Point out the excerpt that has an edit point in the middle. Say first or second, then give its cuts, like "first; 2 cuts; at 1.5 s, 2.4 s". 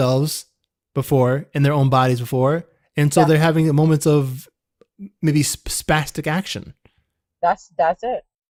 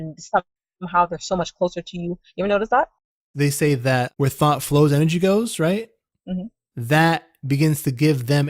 second; 3 cuts; at 3.2 s, 4.1 s, 6.4 s